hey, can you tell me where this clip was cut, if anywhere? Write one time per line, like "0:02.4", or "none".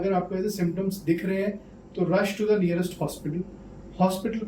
none